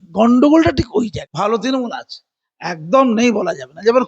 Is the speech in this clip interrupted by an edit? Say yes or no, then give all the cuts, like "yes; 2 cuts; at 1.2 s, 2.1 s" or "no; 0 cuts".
yes; 1 cut; at 1.2 s